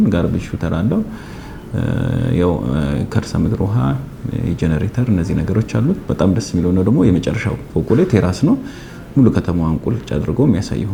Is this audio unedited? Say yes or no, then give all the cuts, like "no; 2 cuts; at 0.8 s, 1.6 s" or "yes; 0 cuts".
yes; 0 cuts